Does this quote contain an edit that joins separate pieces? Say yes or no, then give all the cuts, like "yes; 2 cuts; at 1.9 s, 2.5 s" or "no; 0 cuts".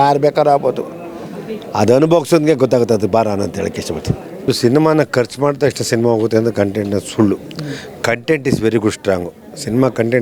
yes; 1 cut; at 4.4 s